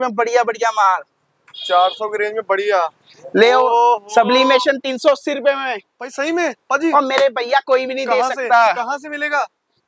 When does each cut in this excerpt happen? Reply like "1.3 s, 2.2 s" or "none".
none